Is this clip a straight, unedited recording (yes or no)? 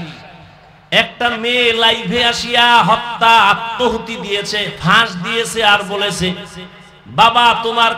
yes